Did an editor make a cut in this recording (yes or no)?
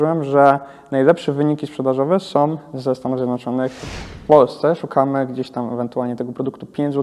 yes